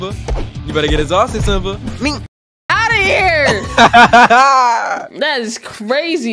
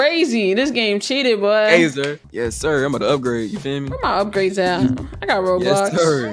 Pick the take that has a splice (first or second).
second